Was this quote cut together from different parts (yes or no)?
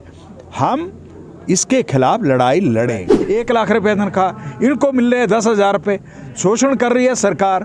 yes